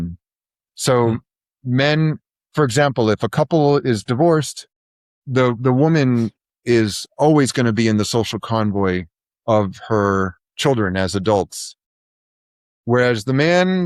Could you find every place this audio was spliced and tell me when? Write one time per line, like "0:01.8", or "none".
0:10.4